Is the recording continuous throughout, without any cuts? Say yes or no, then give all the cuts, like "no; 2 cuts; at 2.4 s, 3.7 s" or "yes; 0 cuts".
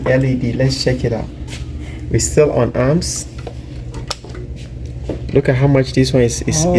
yes; 0 cuts